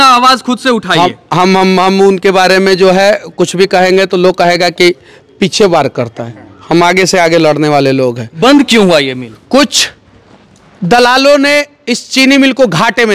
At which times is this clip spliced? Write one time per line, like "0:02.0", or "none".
0:08.3